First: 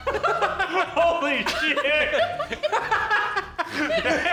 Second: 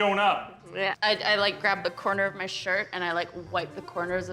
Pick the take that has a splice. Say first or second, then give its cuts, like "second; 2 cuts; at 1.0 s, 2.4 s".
second; 1 cut; at 1.0 s